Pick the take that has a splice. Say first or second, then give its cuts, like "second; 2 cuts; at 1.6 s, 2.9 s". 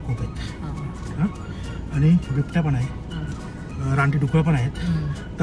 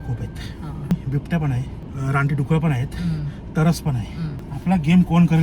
second; 3 cuts; at 0.9 s, 1.8 s, 4.4 s